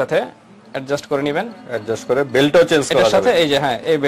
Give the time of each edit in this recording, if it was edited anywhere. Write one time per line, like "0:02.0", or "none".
none